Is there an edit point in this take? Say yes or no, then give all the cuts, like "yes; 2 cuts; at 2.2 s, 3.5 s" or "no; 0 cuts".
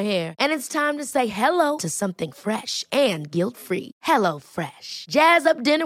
no; 0 cuts